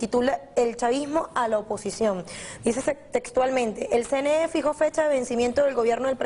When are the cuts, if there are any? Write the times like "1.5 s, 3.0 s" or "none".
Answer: 3.3 s